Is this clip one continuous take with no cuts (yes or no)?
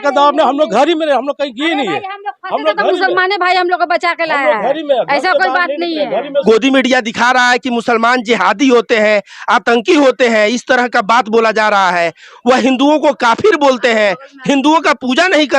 no